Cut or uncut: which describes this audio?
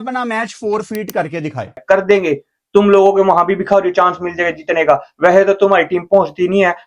cut